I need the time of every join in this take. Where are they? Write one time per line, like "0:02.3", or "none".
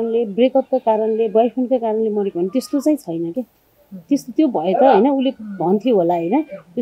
none